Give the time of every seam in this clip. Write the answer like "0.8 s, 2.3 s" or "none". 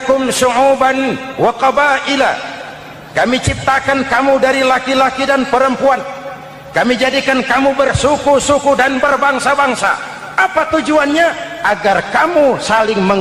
none